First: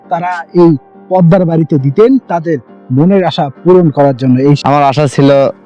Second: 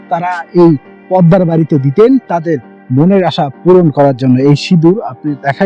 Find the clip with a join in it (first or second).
first